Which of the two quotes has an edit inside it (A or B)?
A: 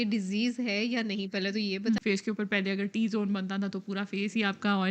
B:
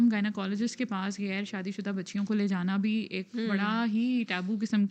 A